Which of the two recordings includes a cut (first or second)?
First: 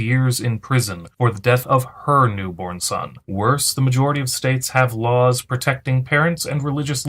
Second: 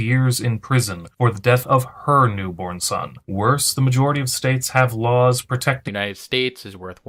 first